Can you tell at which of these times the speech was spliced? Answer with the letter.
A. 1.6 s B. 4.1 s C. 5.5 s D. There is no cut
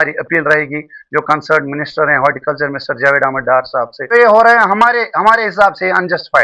B